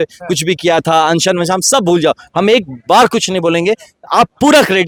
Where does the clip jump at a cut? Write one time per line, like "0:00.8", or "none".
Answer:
none